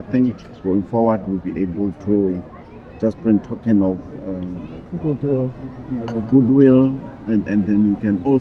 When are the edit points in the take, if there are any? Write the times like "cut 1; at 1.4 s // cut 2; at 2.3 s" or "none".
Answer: none